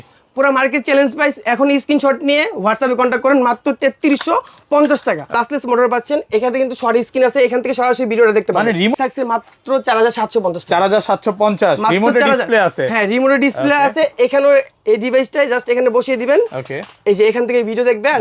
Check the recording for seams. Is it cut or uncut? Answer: cut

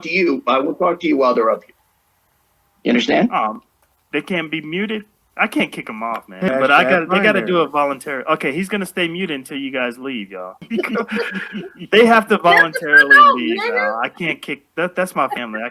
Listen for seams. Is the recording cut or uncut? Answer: cut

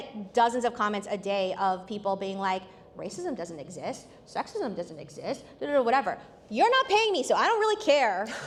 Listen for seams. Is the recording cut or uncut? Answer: uncut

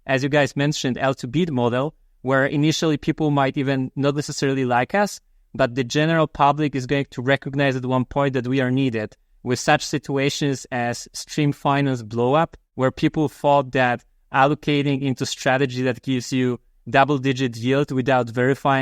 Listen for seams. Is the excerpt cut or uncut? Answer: cut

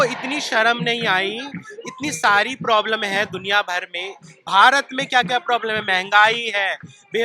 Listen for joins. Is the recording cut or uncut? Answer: uncut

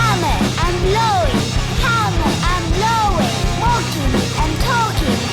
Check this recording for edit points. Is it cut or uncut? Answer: uncut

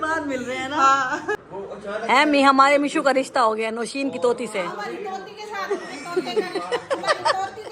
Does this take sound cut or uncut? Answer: cut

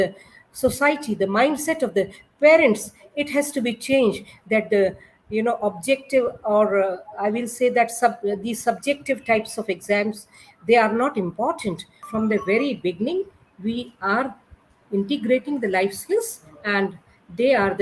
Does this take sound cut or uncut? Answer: cut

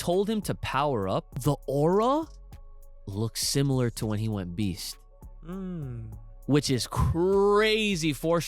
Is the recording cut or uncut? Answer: cut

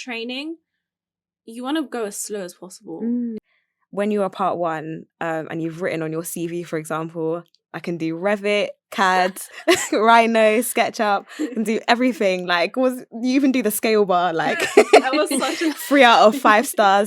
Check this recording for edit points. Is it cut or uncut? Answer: cut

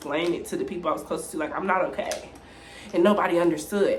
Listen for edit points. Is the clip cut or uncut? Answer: uncut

